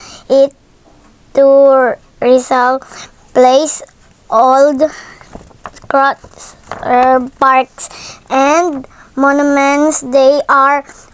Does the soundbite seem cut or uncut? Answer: cut